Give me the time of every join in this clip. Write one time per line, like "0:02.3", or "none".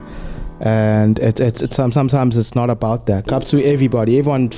0:03.3